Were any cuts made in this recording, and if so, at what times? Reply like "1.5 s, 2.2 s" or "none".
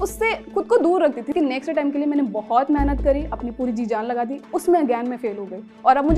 1.3 s